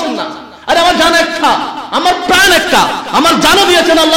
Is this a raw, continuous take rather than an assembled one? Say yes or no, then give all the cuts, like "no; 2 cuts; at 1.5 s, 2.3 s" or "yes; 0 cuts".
yes; 0 cuts